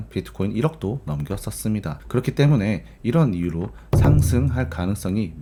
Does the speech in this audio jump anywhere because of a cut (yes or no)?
no